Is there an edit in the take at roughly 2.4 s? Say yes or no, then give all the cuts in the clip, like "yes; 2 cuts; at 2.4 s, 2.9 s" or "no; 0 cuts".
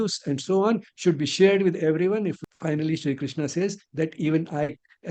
yes; 1 cut; at 2.4 s